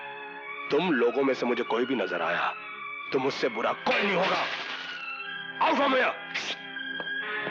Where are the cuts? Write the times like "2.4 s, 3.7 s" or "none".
none

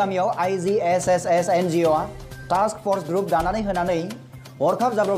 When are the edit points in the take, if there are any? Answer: none

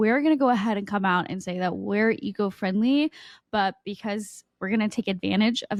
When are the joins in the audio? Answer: none

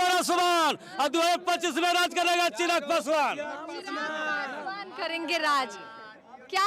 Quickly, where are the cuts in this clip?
none

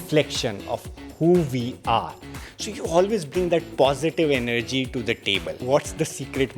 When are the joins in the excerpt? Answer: 2.5 s, 5.6 s

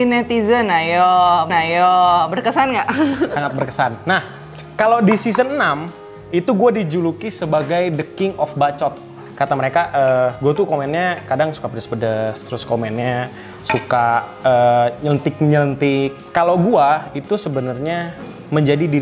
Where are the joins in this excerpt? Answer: none

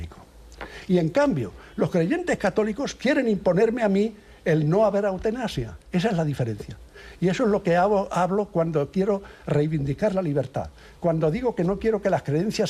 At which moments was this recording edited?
none

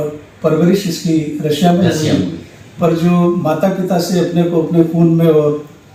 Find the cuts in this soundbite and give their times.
none

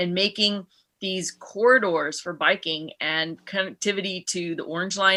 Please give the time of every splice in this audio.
none

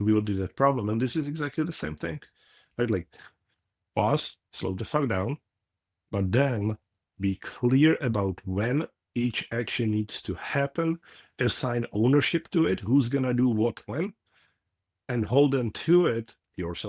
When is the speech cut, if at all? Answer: none

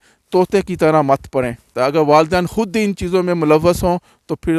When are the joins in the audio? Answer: 1.6 s

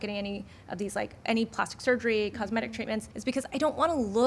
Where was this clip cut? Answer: 3.1 s

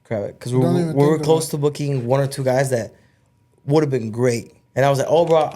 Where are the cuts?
4.5 s

